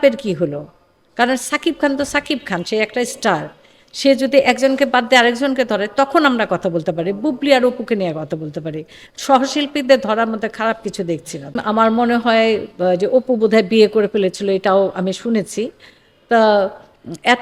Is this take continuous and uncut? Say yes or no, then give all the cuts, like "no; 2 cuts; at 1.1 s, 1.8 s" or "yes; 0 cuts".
no; 1 cut; at 11.6 s